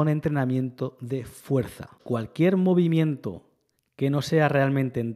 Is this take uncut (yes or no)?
no